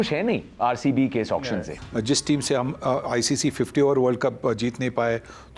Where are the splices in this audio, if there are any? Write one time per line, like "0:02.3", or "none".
0:01.8